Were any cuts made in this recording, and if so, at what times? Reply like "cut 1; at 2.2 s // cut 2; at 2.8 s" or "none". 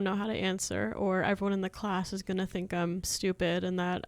cut 1; at 3.1 s